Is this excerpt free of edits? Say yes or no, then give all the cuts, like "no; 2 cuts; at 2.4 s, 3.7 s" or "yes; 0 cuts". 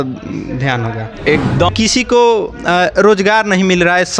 no; 1 cut; at 1.7 s